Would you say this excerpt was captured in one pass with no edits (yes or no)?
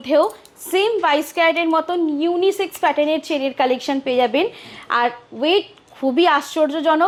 yes